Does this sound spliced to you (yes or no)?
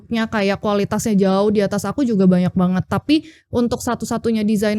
no